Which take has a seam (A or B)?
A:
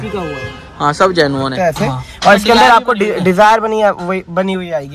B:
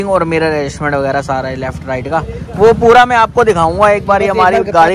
A